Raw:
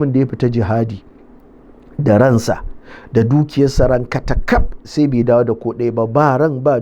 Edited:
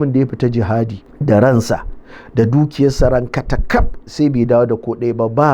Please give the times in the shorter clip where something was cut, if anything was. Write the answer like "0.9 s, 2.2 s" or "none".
1.0 s